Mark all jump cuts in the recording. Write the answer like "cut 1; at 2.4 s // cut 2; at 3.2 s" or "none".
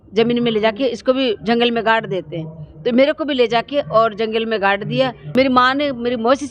cut 1; at 5.2 s